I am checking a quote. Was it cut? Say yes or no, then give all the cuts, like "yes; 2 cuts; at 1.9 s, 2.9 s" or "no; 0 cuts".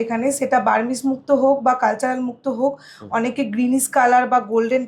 no; 0 cuts